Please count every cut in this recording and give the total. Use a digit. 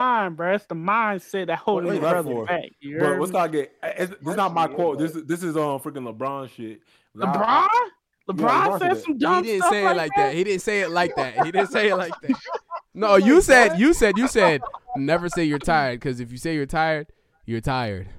1